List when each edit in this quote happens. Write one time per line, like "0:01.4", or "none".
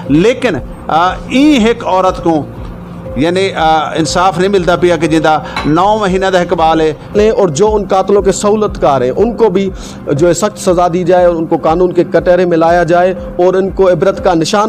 0:07.1